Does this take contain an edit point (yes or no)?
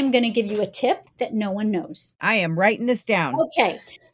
yes